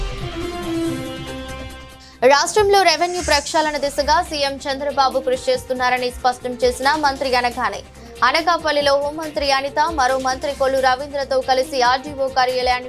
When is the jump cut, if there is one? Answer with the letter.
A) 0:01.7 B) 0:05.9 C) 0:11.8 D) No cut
A